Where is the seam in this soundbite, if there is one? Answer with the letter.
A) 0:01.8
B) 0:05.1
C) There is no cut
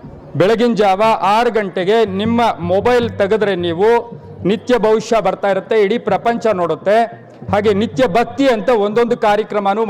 C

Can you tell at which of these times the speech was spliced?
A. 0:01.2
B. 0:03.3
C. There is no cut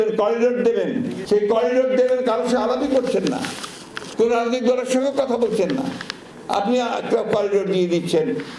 A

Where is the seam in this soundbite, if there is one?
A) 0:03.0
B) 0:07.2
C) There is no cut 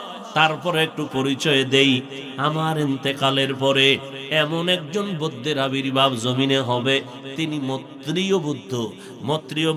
C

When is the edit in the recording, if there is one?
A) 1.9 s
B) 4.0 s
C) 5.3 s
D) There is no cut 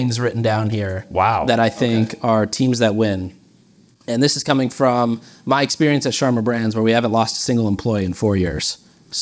D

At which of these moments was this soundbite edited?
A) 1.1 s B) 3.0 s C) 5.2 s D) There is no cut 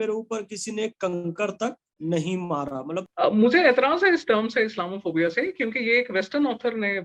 B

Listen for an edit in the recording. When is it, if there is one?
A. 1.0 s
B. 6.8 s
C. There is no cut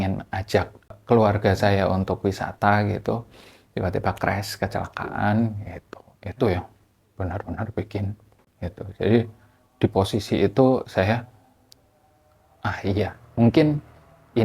A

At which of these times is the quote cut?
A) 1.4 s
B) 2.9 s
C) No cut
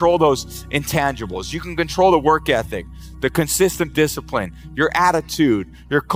C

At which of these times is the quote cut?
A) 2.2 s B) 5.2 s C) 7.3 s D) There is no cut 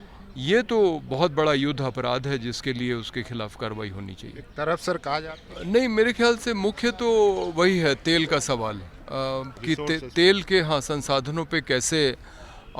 B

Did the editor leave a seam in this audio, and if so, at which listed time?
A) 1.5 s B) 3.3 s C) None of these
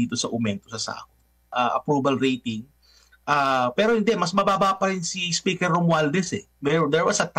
A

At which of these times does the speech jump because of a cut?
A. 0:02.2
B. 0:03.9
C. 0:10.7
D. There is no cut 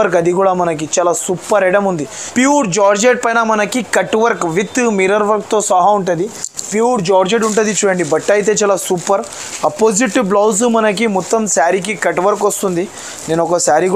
A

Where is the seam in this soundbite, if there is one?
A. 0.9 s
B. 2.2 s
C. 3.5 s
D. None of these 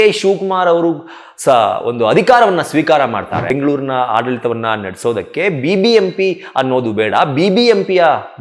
C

